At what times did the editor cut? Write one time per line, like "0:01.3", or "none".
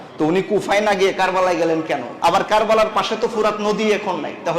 0:02.1